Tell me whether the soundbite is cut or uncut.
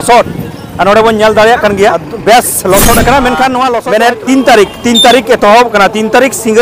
cut